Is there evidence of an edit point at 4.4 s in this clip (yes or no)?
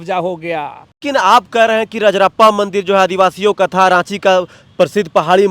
no